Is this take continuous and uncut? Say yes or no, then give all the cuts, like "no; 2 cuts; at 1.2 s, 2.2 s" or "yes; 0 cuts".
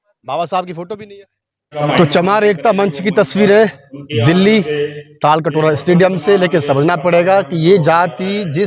no; 1 cut; at 1.8 s